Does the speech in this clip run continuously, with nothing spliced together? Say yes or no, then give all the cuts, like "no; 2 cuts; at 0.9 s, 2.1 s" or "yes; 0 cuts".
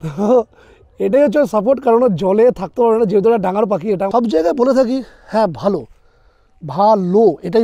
no; 1 cut; at 4.1 s